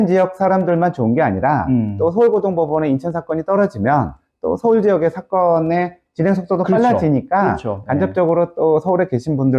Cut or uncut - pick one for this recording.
uncut